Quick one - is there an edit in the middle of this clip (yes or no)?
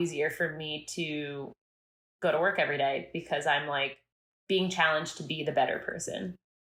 no